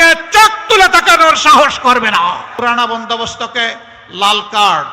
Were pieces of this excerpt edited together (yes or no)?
yes